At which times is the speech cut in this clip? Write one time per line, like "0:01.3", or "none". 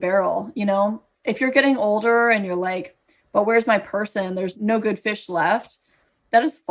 0:04.5